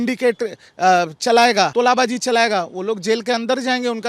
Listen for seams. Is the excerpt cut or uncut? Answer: cut